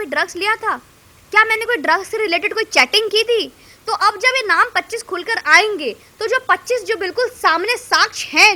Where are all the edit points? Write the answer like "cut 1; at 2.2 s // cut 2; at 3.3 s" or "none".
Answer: none